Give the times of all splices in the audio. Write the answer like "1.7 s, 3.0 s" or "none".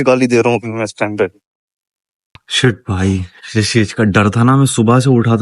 2.5 s